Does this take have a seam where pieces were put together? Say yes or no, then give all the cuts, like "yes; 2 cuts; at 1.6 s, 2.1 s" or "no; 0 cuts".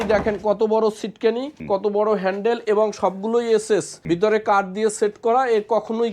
yes; 2 cuts; at 1.5 s, 3.9 s